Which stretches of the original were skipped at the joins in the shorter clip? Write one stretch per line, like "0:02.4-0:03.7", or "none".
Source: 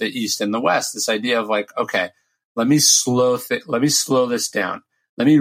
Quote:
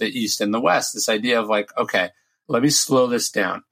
0:02.4-0:03.6